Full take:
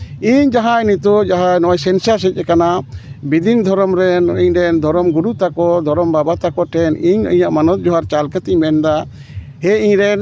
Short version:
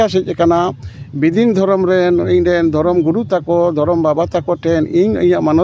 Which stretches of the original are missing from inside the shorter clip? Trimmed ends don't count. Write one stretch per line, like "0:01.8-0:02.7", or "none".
none